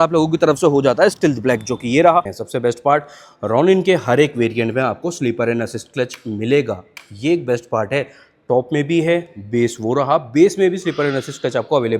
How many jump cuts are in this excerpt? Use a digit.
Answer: 1